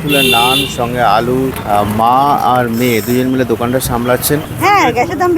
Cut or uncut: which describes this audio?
cut